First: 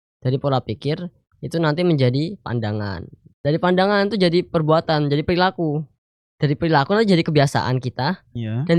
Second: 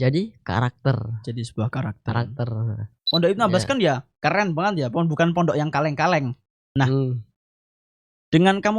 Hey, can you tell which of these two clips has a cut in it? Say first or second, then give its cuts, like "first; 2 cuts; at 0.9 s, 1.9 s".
second; 1 cut; at 3.1 s